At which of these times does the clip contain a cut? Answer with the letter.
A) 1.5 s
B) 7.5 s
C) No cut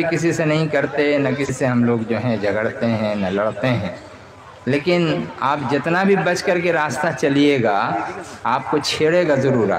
A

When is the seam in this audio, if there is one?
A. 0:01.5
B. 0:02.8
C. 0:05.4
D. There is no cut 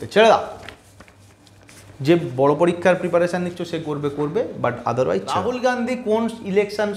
C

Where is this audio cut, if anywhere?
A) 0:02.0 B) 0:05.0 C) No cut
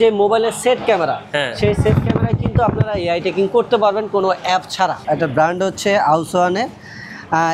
B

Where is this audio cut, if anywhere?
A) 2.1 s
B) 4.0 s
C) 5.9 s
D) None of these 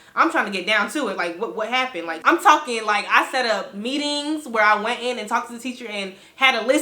A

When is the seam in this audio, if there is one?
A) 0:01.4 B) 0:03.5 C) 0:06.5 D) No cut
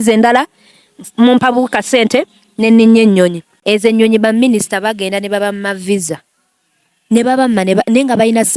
B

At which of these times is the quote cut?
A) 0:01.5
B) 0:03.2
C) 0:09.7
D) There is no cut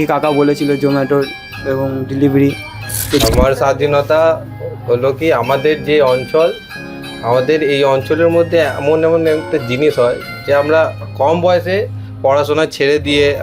B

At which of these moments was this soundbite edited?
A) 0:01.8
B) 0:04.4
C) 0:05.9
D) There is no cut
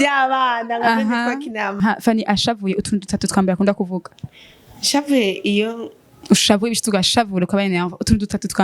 A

